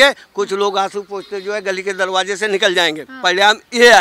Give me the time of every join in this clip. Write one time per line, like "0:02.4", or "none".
0:03.1